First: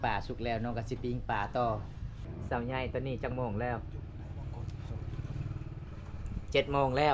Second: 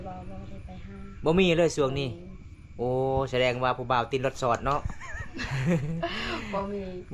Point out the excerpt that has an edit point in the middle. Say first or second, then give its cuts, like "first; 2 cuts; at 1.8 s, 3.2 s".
first; 2 cuts; at 2.4 s, 5.9 s